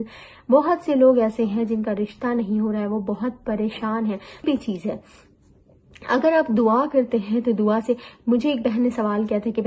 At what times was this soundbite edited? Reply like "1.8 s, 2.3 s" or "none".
4.4 s